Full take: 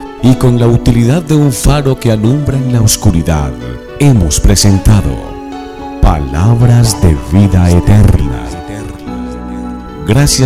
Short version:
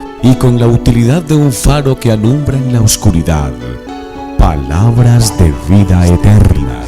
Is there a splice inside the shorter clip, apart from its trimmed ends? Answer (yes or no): yes